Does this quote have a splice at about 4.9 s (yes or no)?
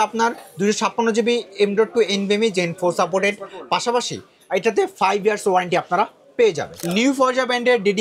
no